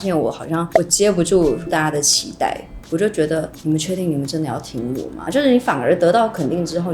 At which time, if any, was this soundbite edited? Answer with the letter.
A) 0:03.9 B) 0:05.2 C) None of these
B